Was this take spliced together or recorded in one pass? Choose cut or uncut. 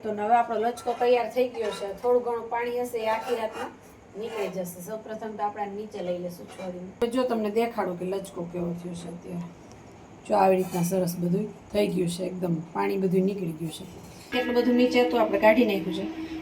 cut